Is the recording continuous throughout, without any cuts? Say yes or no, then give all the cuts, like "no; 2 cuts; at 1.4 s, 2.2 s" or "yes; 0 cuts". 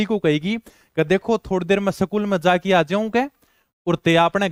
yes; 0 cuts